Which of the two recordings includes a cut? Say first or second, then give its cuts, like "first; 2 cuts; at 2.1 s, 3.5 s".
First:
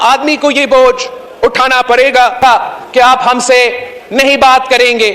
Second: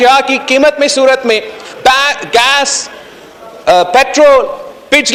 first; 1 cut; at 2.4 s